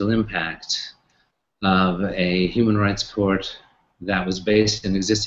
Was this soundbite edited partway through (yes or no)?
yes